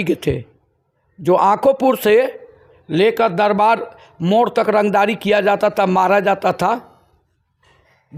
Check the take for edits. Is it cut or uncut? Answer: uncut